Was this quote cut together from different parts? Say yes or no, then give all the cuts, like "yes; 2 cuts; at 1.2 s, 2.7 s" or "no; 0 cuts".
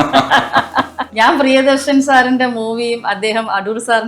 yes; 1 cut; at 1.0 s